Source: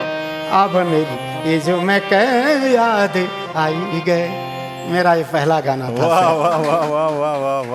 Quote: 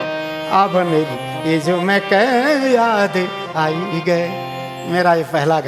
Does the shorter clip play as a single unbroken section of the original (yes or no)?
yes